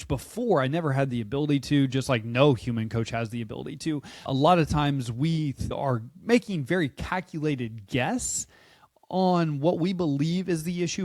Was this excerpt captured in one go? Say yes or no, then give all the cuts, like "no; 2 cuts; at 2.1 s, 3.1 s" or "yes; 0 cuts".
no; 2 cuts; at 4.3 s, 5.8 s